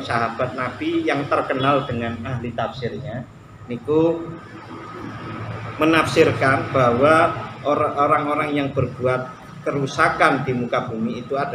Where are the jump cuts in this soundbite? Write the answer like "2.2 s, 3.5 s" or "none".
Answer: none